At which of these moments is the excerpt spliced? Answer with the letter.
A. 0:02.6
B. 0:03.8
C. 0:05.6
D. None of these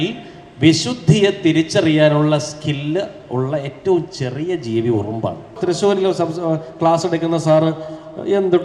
C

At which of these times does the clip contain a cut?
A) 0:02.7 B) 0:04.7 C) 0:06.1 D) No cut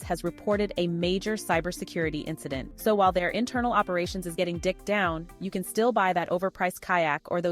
A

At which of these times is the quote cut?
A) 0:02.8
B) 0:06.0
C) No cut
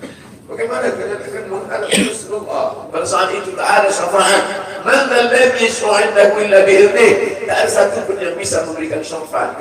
A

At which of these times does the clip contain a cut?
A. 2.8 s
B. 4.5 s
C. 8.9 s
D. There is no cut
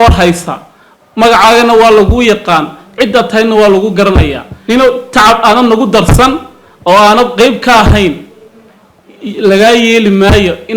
B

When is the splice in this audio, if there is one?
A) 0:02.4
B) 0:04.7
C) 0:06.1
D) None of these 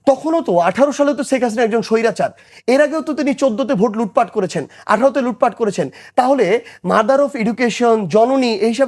D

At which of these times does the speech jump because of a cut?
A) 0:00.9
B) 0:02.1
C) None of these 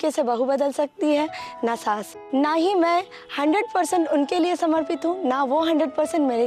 B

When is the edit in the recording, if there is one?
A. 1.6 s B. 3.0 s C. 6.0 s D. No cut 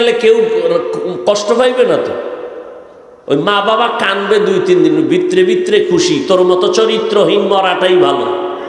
D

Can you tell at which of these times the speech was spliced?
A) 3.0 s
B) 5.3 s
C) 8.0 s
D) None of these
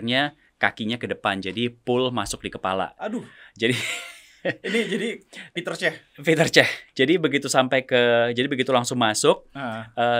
D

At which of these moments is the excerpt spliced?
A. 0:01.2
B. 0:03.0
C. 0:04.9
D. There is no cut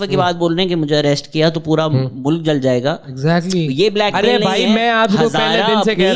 D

